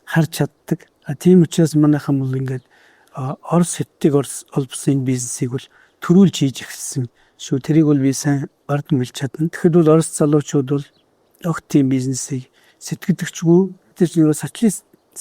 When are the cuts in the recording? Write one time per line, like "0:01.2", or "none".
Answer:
none